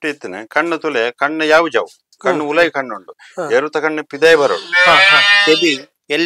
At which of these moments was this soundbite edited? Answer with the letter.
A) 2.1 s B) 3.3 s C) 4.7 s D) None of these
D